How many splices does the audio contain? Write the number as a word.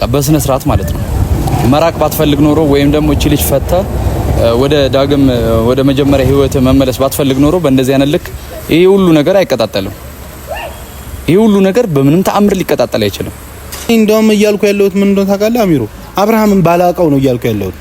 one